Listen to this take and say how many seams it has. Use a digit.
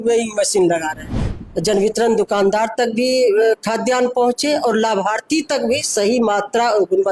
1